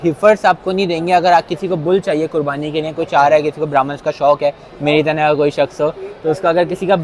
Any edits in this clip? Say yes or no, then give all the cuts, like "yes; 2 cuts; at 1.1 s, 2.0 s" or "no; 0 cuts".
no; 0 cuts